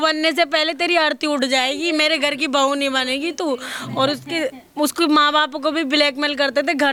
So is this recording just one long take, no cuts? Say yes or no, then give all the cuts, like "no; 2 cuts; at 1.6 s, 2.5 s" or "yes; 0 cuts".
yes; 0 cuts